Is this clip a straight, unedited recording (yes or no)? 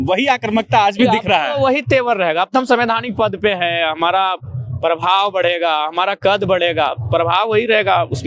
yes